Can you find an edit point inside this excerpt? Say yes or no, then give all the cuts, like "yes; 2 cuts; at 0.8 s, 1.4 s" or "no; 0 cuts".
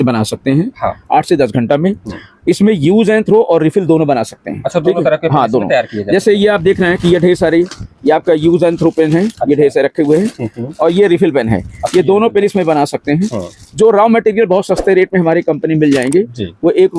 no; 0 cuts